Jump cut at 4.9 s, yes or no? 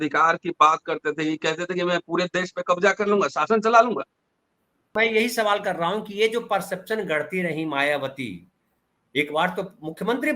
yes